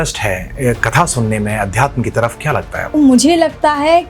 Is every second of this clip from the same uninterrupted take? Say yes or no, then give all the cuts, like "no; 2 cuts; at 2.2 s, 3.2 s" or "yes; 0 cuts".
no; 1 cut; at 2.9 s